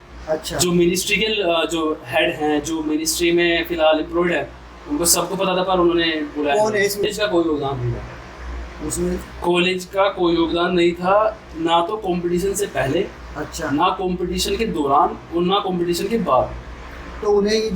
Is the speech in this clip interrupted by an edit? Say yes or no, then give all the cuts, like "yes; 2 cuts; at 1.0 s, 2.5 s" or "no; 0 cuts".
yes; 1 cut; at 7.1 s